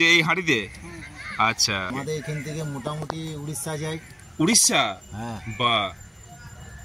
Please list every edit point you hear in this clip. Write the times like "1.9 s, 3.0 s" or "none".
1.9 s